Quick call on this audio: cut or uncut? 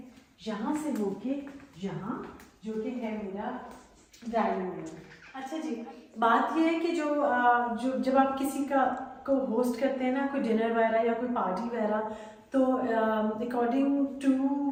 uncut